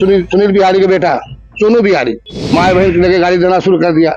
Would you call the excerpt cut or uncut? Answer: cut